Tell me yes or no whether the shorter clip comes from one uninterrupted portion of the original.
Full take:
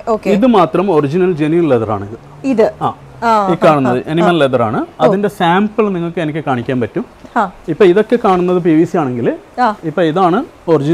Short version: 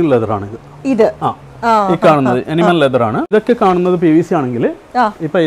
no